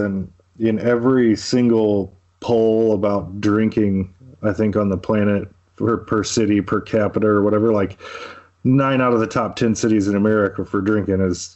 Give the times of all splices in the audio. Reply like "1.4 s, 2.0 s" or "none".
none

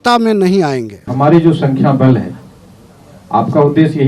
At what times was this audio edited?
1.0 s

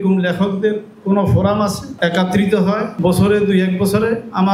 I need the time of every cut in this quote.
none

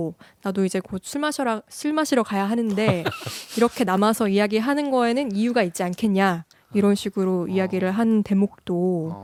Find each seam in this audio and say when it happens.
none

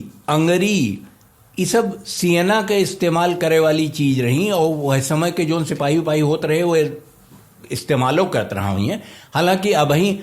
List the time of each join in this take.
none

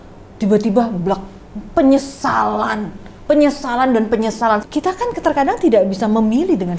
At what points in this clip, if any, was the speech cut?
4.6 s

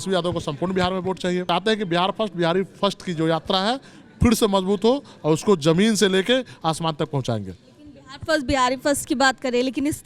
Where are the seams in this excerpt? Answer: 1.5 s

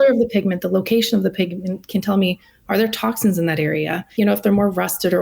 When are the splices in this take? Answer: 4.1 s

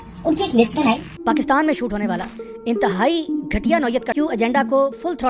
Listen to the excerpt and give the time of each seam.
1.1 s, 4.1 s

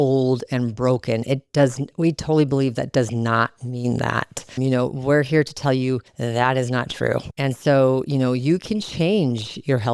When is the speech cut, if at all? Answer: none

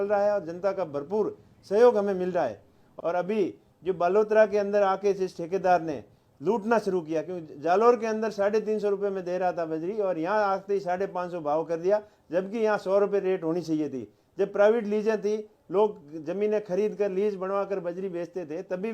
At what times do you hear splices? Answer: 2.8 s

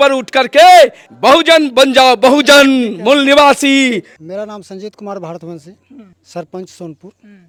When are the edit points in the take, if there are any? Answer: none

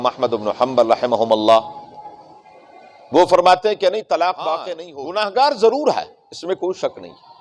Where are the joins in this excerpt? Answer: 4.8 s

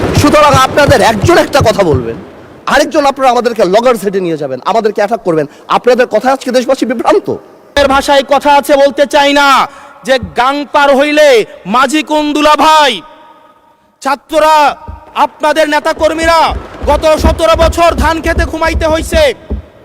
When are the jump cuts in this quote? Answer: 7.7 s

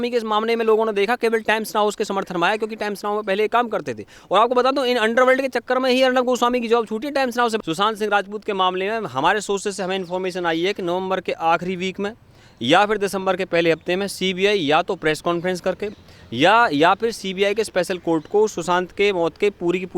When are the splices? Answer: 7.6 s

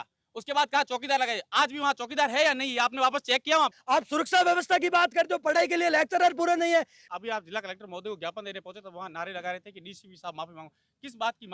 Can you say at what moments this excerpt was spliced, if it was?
3.8 s, 7.0 s

